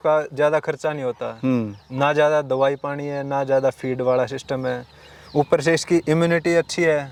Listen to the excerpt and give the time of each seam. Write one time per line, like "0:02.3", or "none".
none